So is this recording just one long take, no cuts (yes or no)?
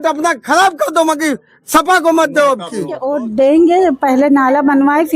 no